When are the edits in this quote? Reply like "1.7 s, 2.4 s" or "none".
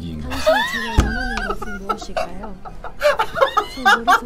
none